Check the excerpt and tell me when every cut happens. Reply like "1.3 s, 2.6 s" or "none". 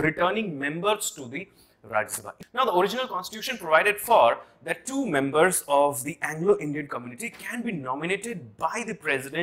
2.2 s